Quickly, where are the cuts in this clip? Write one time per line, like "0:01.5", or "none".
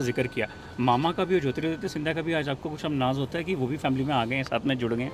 none